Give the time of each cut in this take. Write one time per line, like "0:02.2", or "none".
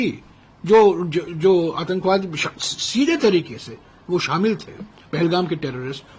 none